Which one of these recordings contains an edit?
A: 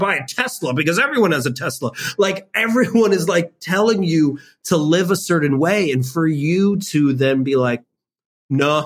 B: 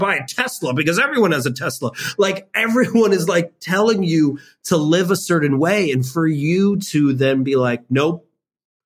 A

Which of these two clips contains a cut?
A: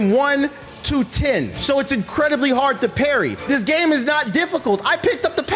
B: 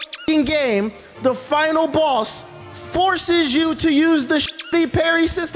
A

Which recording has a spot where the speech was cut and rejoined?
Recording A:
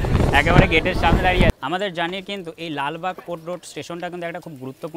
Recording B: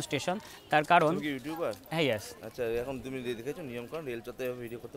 A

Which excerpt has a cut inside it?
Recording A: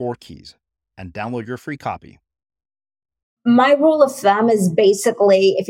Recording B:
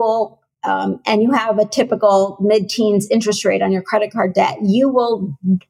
A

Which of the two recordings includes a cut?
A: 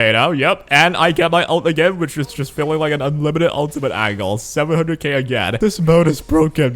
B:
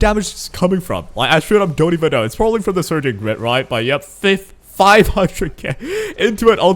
A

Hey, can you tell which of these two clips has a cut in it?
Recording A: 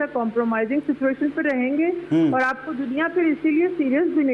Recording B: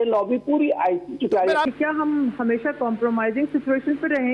B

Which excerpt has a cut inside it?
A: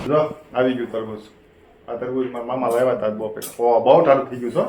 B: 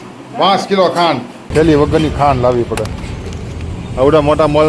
B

